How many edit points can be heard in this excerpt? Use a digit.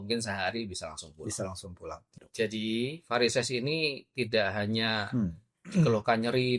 1